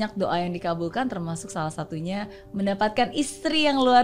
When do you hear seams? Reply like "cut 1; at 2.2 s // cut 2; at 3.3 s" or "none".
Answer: none